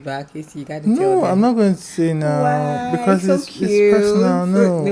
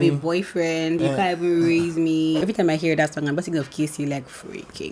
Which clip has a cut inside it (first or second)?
second